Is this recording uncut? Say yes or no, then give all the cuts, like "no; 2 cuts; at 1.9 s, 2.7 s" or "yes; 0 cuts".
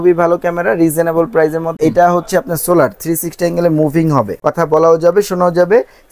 no; 2 cuts; at 1.8 s, 4.3 s